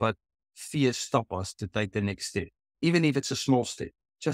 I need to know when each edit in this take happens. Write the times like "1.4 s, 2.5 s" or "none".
2.6 s